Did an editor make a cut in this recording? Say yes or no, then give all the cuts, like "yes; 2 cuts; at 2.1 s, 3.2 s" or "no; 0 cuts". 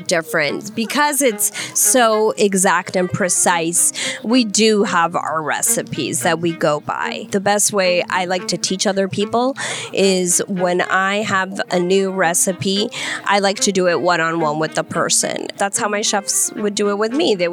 yes; 2 cuts; at 7.2 s, 15.5 s